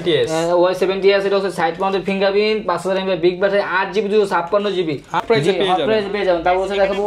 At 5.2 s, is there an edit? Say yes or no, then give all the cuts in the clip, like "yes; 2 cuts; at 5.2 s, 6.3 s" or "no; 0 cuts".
yes; 1 cut; at 5.2 s